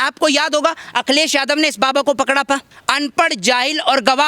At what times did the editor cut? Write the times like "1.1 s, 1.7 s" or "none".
2.8 s